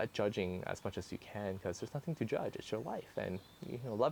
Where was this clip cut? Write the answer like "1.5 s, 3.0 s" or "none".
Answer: none